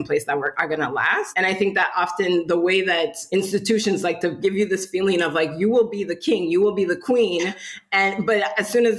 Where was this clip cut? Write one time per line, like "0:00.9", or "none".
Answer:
0:01.3
0:03.2
0:04.4